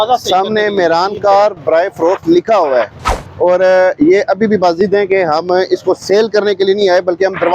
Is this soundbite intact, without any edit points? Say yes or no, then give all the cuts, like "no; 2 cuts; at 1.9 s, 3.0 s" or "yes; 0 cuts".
yes; 0 cuts